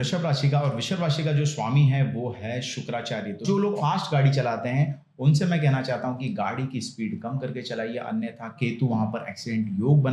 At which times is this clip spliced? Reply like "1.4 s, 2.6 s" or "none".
3.8 s, 8.6 s

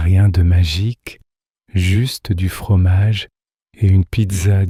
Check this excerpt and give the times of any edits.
none

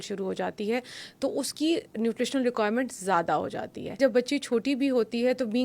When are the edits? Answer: 3.9 s

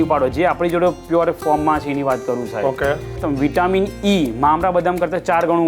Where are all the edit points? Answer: 3.2 s

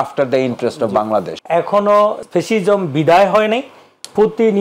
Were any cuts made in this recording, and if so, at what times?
1.3 s, 2.2 s

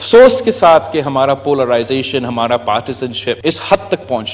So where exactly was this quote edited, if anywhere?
3.4 s

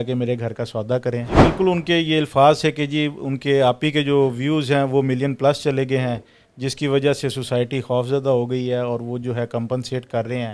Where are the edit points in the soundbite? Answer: 1.4 s

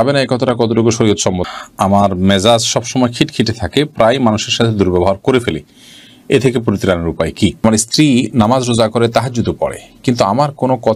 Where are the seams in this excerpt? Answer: 1.4 s, 7.6 s

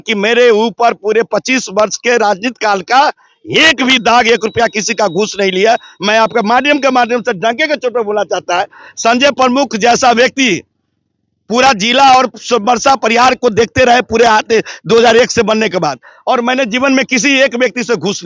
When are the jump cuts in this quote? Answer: none

